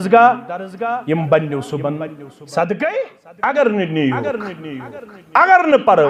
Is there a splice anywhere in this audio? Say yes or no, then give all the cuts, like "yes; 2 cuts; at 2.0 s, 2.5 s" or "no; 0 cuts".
yes; 1 cut; at 3.2 s